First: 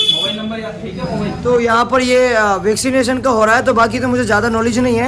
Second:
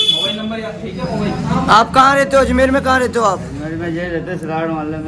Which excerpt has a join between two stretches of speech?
first; 1 cut; at 1.4 s

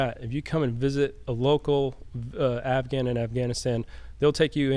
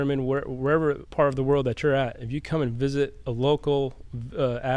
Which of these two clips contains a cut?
second; 1 cut; at 1.0 s

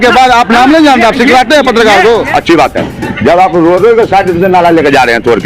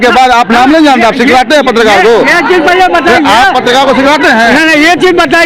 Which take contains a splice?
first; 1 cut; at 2.3 s

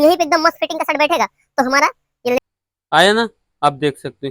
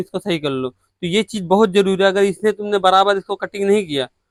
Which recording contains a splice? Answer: first; 1 cut; at 2.4 s

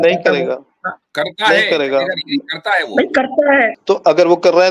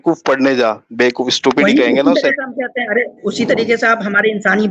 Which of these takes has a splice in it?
first; 1 cut; at 3.8 s

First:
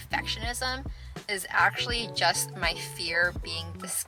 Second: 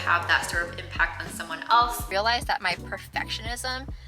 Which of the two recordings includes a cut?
second; 1 cut; at 2.1 s

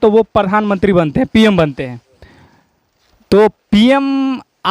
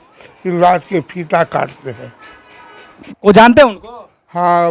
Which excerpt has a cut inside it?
second; 1 cut; at 3.1 s

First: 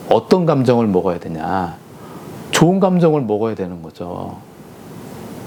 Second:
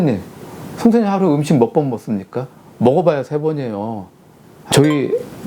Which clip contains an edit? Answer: second; 1 cut; at 4.5 s

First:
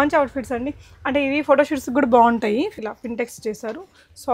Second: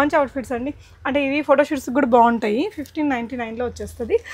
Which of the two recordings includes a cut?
first; 1 cut; at 2.8 s

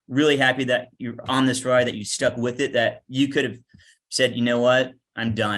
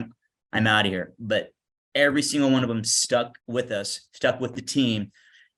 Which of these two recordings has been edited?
second; 1 cut; at 3.4 s

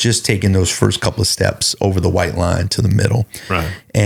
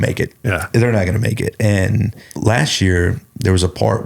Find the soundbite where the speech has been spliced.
second; 1 cut; at 2.3 s

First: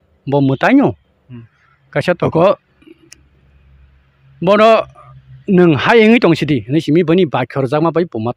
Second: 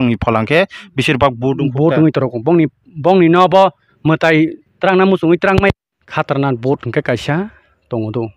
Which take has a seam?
second; 1 cut; at 6.0 s

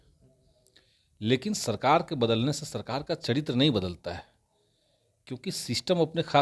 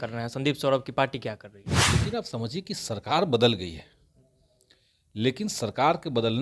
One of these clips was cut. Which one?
second; 1 cut; at 1.8 s

